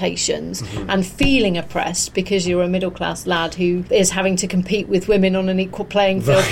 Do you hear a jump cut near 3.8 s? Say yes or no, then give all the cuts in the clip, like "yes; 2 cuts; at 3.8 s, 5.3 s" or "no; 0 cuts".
yes; 1 cut; at 3.8 s